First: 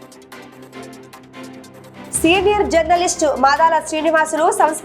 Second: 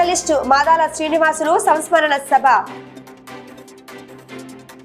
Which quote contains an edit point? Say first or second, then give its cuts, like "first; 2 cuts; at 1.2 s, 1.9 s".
first; 1 cut; at 1.5 s